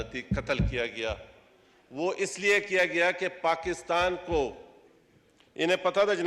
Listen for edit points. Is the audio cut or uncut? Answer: uncut